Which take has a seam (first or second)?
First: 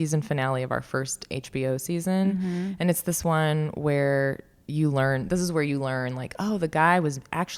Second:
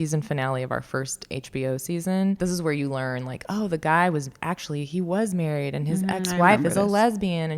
second